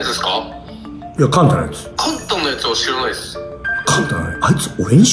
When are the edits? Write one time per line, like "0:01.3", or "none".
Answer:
0:01.8